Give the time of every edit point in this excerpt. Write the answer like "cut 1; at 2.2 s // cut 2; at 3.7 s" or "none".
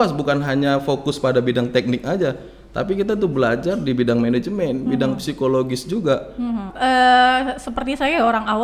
cut 1; at 6.7 s